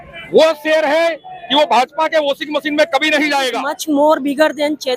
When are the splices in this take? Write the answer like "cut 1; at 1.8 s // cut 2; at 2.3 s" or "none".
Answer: cut 1; at 3.7 s